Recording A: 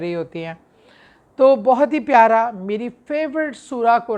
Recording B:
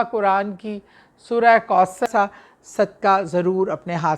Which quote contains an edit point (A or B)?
B